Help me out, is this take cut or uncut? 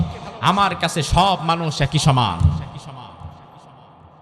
uncut